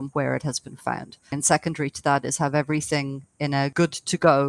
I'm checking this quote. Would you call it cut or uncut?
cut